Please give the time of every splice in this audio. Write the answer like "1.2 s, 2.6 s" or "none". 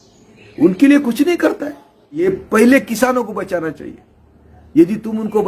2.2 s